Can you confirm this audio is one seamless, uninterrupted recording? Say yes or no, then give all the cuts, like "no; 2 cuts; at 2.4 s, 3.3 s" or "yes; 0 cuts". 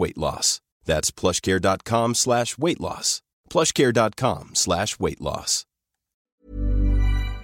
no; 1 cut; at 6.3 s